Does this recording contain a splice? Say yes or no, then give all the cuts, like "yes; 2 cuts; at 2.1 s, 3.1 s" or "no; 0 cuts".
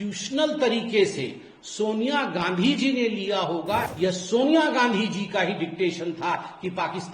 yes; 1 cut; at 3.9 s